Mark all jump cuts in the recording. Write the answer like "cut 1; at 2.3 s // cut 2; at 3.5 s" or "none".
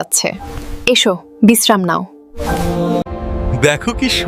cut 1; at 3.1 s